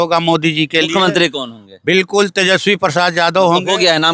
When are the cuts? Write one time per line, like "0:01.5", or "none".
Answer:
none